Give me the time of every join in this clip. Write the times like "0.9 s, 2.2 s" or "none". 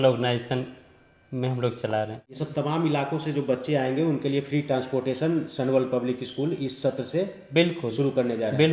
2.4 s

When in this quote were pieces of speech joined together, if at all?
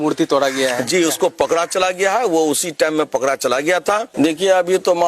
4.1 s

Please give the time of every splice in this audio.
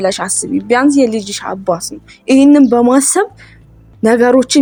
none

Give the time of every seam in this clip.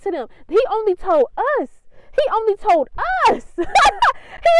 none

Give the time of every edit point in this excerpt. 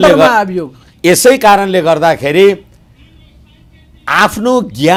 none

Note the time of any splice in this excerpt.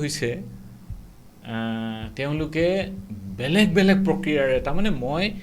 none

